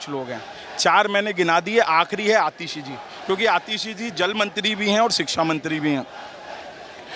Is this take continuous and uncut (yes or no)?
yes